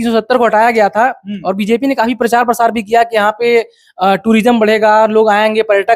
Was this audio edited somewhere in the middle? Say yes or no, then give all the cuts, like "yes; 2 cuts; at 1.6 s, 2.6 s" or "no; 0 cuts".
no; 0 cuts